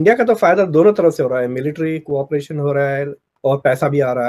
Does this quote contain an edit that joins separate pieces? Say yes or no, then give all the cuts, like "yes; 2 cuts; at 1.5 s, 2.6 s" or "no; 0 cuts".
yes; 1 cut; at 3.2 s